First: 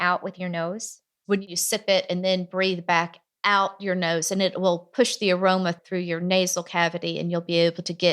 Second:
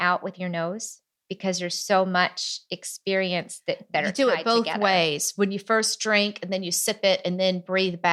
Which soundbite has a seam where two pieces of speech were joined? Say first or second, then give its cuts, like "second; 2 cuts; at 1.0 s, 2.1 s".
first; 1 cut; at 1.4 s